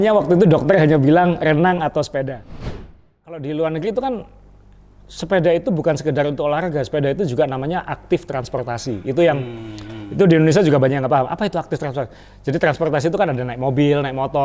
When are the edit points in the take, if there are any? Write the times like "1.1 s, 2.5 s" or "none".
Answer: 2.9 s